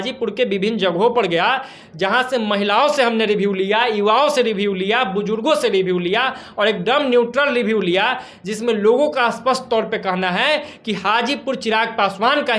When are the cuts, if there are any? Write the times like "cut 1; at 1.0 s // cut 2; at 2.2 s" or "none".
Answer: none

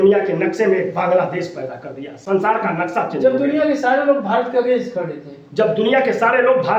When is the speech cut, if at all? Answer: none

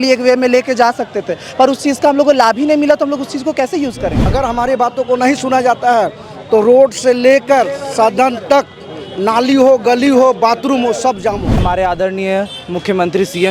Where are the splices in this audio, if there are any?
cut 1; at 4.2 s // cut 2; at 11.6 s

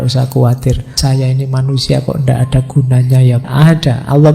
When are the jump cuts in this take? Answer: cut 1; at 0.9 s // cut 2; at 3.4 s

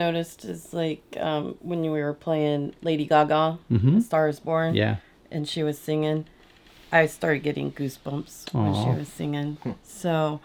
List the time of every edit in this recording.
none

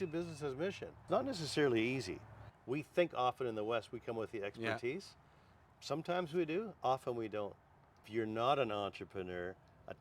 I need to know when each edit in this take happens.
cut 1; at 1.0 s // cut 2; at 2.5 s // cut 3; at 8.0 s

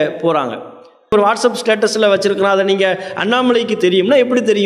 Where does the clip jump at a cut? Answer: cut 1; at 1.1 s

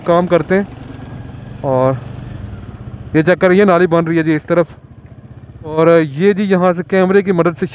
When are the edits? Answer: cut 1; at 5.8 s

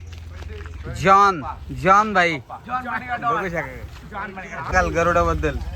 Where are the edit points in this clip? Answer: cut 1; at 4.7 s

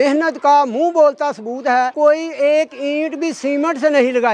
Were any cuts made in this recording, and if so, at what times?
cut 1; at 1.9 s

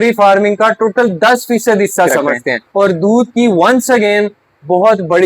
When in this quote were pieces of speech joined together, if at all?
cut 1; at 2.5 s

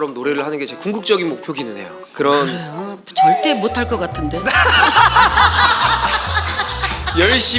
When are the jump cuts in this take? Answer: none

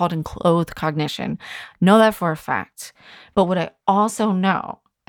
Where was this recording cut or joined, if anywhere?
cut 1; at 3.2 s

